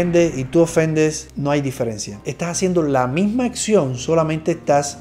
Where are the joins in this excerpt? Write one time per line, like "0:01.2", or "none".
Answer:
none